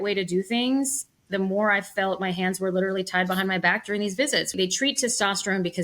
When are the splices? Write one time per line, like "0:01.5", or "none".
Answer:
0:04.5